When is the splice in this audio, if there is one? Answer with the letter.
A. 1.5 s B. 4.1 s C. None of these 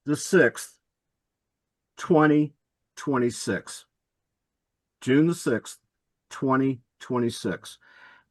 C